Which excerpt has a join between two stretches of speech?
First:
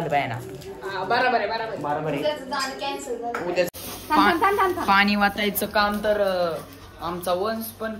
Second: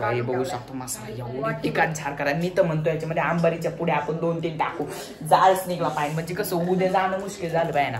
first; 1 cut; at 3.7 s

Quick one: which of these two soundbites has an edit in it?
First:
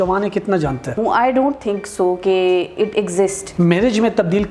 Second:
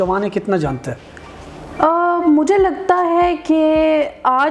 first; 2 cuts; at 0.9 s, 3.4 s

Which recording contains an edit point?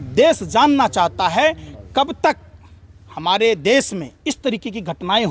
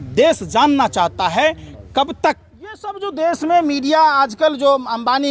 second; 1 cut; at 3.0 s

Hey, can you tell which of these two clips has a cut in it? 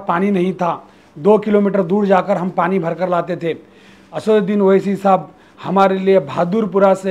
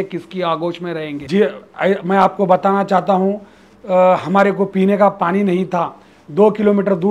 second; 1 cut; at 1.2 s

